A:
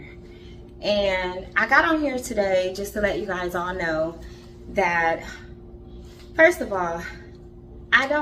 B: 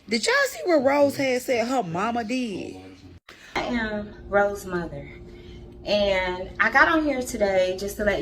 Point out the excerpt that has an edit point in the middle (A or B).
B